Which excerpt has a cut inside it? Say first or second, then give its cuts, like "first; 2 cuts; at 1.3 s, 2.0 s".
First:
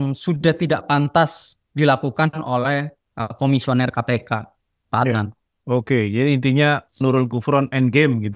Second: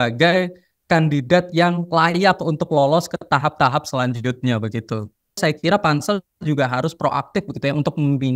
second; 1 cut; at 5.4 s